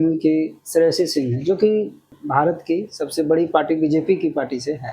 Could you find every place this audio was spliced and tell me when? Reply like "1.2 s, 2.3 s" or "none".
2.2 s